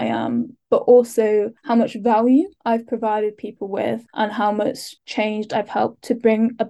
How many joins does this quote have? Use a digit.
4